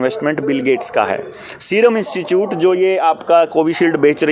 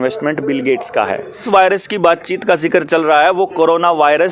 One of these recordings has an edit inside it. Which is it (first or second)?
second